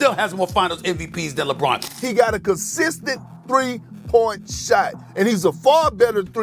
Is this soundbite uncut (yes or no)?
no